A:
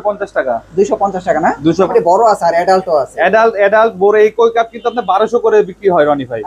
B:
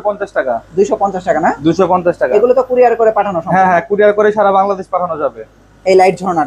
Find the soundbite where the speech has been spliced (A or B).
A